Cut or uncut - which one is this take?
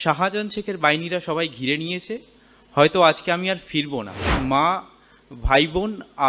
cut